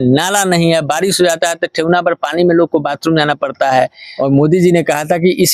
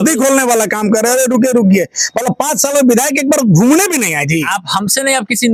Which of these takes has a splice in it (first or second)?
first